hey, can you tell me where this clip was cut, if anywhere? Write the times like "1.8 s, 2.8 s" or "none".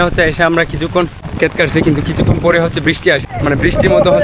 1.2 s, 3.3 s